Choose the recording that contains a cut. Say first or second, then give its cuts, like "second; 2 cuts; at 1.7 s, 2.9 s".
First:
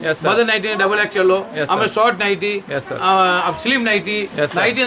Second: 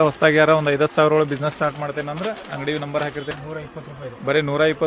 second; 1 cut; at 3.3 s